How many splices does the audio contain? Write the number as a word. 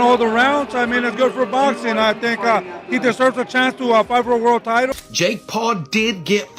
one